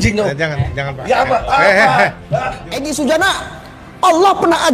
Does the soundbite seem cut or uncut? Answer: cut